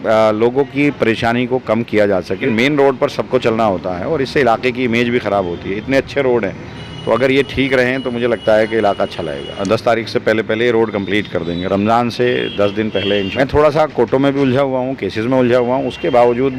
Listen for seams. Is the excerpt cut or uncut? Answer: cut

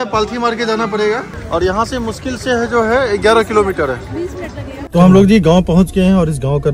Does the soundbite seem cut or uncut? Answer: cut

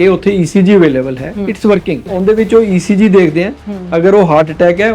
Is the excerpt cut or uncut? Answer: cut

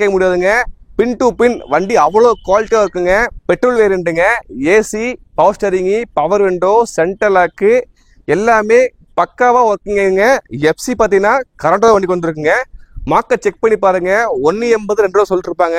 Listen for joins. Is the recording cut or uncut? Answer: cut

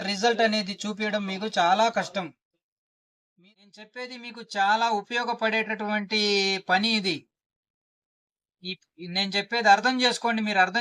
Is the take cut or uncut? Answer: cut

